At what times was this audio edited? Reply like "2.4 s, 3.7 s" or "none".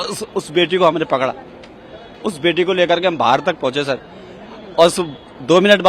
none